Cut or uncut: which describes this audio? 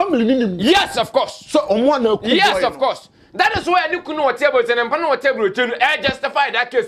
uncut